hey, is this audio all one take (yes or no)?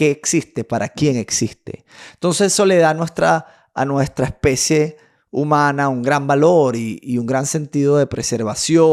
yes